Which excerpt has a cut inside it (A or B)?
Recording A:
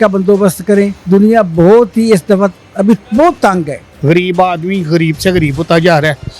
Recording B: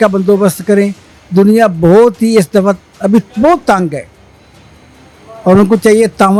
A